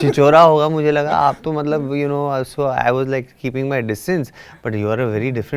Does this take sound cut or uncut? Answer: uncut